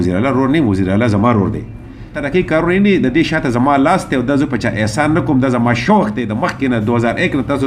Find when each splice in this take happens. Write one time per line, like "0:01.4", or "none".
0:02.2